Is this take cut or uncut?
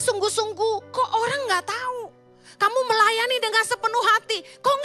uncut